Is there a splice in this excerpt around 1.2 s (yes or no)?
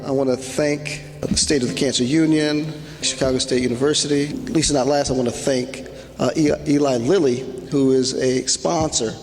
yes